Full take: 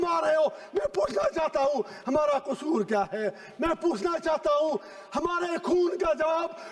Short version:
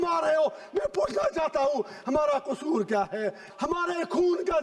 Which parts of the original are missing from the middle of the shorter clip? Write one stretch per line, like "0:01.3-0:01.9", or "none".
0:03.4-0:05.0

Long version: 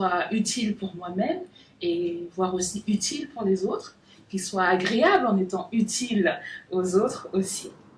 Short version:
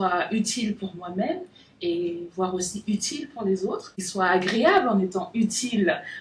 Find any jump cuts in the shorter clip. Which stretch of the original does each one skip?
0:04.0-0:04.3

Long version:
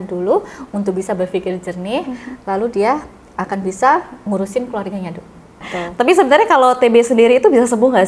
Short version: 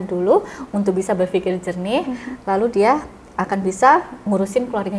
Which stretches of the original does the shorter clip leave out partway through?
none

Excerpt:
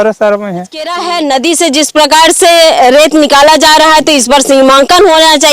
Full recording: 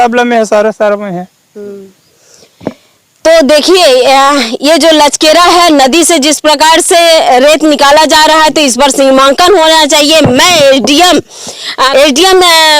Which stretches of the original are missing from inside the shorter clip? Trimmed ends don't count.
0:01.5-0:05.4

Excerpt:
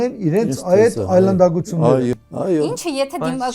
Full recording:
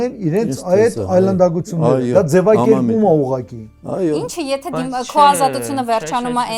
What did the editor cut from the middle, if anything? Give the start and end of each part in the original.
0:02.1-0:03.6

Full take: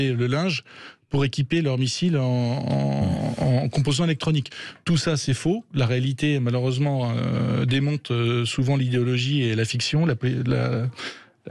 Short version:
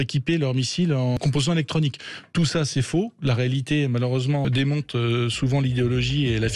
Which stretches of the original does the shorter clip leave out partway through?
0:02.4-0:03.7
0:07.0-0:07.6

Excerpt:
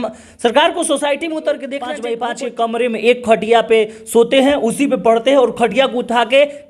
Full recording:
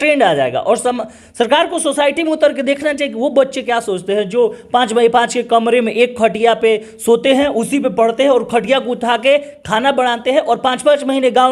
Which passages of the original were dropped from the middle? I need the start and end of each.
0:02.9-0:04.9

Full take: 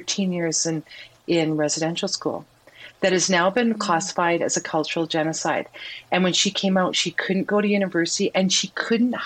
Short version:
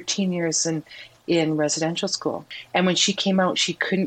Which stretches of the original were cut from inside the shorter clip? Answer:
0:02.5-0:05.9

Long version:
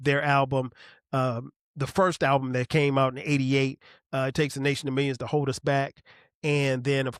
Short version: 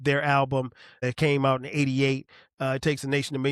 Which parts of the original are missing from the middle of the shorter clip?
0:01.0-0:02.5

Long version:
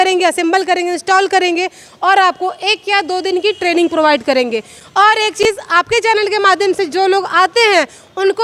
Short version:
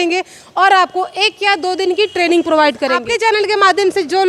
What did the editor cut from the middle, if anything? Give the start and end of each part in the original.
0:04.4-0:05.8

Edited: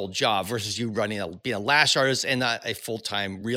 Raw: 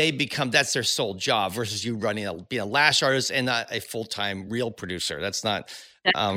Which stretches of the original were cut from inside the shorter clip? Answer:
none

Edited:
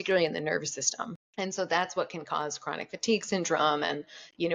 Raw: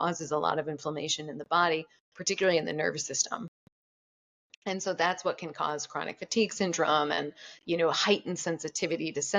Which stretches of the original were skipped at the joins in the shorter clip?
0:03.5-0:04.5

